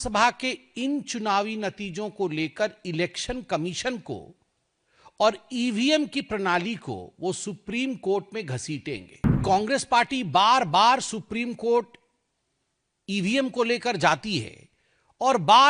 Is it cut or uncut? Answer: cut